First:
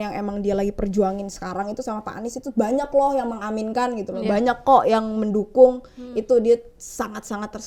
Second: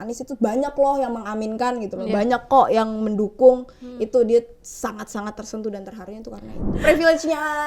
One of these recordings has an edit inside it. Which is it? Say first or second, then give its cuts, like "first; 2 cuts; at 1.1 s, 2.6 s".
second; 1 cut; at 6.7 s